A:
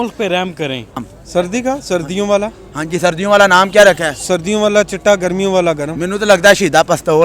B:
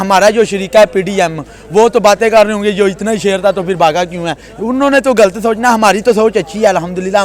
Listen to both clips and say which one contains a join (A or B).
A